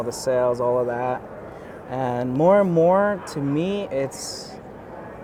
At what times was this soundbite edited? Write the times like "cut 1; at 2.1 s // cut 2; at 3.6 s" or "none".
none